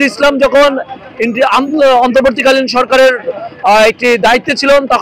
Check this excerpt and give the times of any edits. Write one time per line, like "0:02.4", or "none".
none